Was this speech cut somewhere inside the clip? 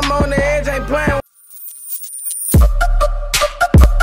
yes; 1 cut; at 1.4 s

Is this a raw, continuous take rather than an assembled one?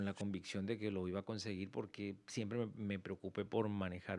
yes; 0 cuts

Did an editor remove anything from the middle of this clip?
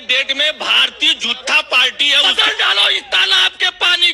yes; 1 cut; at 2.2 s

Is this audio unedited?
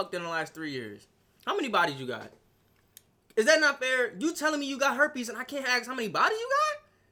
yes; 0 cuts

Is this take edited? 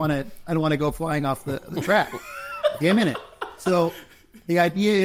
no; 0 cuts

